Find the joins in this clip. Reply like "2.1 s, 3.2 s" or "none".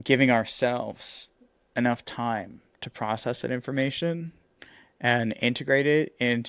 none